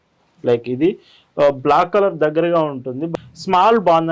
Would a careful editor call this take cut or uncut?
cut